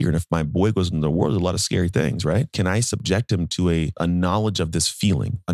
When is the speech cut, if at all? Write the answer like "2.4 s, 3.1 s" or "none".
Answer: 2.5 s, 4.0 s